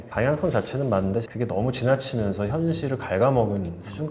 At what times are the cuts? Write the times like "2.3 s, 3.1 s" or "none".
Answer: 1.3 s